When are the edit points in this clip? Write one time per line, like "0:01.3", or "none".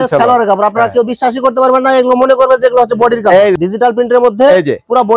0:03.6